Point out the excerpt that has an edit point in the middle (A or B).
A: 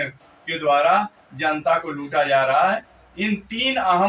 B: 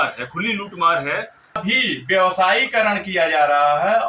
B